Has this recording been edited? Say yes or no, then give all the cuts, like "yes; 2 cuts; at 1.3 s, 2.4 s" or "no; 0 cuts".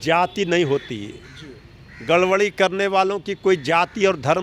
no; 0 cuts